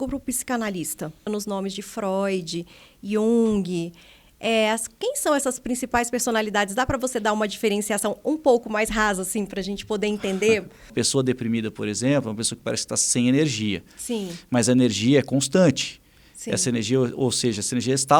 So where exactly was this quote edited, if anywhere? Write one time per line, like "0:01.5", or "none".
0:01.3
0:10.9